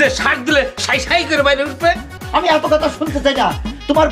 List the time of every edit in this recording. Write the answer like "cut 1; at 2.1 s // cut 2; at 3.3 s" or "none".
cut 1; at 2.2 s